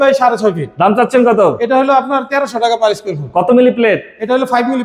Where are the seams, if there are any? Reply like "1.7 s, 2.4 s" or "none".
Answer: none